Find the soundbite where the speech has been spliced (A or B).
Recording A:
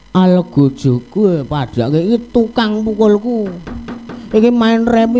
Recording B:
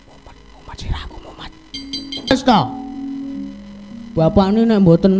B